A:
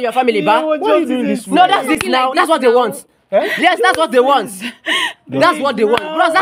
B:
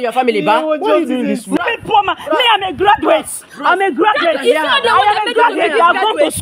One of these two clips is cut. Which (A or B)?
B